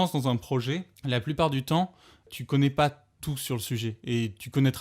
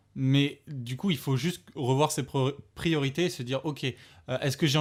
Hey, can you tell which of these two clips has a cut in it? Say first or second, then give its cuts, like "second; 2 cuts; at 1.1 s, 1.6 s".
first; 2 cuts; at 0.9 s, 2.3 s